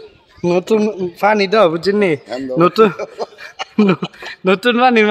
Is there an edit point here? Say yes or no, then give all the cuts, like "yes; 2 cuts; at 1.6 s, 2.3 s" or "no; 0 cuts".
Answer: no; 0 cuts